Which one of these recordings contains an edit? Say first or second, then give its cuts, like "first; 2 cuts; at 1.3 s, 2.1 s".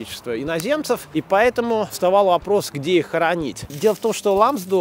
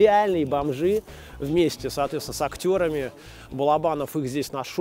first; 3 cuts; at 1.0 s, 1.9 s, 3.8 s